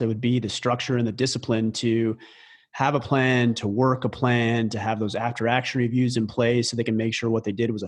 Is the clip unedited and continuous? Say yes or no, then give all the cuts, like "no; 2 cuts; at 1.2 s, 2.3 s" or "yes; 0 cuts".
yes; 0 cuts